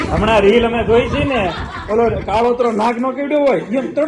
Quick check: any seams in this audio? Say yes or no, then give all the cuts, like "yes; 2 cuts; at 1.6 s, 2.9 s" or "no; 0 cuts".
no; 0 cuts